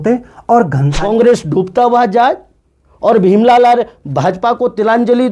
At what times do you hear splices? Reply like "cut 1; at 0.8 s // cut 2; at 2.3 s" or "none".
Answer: cut 1; at 0.9 s